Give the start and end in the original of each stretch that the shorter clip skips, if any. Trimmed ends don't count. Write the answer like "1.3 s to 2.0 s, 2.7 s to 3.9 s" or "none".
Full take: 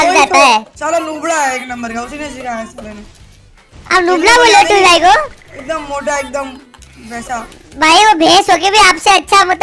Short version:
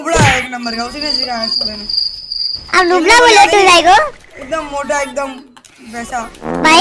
none